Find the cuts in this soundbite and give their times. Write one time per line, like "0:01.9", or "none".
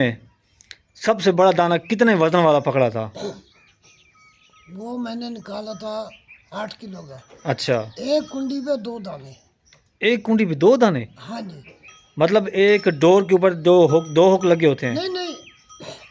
none